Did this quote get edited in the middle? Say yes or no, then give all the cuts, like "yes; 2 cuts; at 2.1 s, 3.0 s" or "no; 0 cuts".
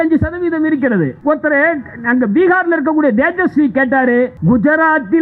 yes; 2 cuts; at 1.2 s, 4.4 s